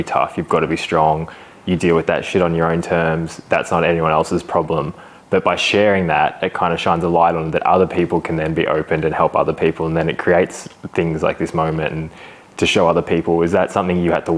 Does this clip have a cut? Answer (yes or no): no